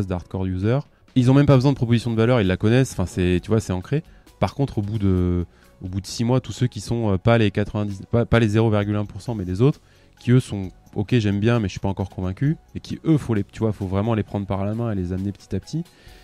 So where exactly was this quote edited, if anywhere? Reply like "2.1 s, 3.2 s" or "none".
1.0 s